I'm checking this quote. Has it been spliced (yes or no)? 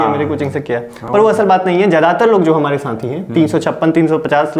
no